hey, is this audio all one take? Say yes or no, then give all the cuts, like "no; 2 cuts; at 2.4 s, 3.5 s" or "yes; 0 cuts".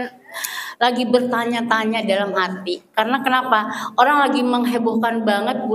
yes; 0 cuts